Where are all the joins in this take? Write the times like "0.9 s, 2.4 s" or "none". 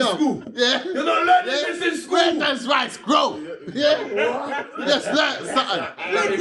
none